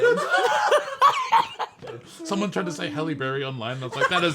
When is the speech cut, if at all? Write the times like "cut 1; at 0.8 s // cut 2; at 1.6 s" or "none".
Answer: cut 1; at 2.1 s